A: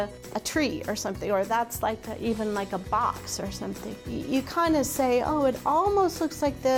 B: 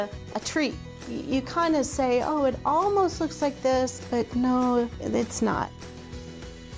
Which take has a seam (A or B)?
B